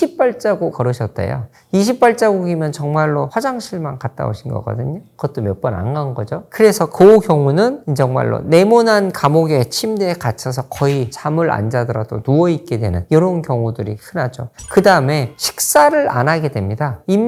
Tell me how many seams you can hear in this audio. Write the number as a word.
zero